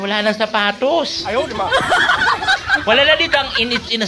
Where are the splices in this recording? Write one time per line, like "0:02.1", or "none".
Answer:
0:01.2
0:02.7

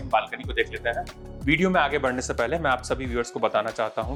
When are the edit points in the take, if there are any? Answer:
none

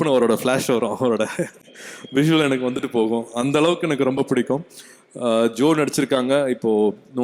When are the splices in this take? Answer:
none

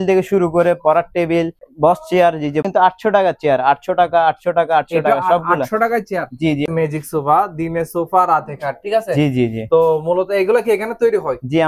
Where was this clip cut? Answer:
0:01.6
0:02.7
0:06.7

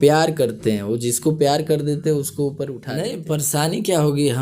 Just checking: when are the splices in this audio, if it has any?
0:02.8

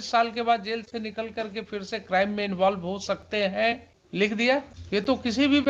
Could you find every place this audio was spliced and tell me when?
0:04.0
0:04.8

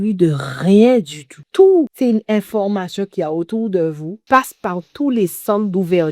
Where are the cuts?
0:01.4
0:01.9
0:04.1

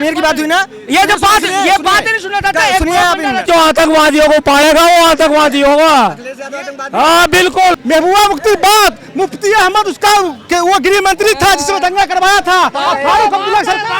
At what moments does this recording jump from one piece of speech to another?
0:03.5
0:07.7

